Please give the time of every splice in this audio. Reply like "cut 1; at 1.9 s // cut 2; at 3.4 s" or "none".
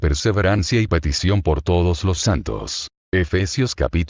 cut 1; at 2.1 s